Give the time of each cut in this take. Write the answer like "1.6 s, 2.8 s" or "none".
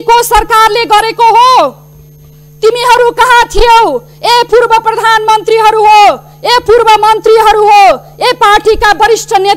none